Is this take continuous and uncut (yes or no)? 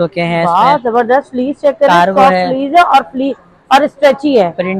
yes